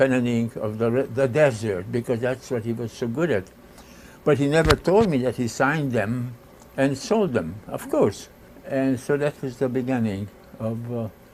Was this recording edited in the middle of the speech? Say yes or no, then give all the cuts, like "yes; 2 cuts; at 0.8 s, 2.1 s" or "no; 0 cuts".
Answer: yes; 1 cut; at 1.2 s